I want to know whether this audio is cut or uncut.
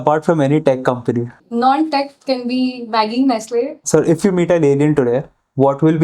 cut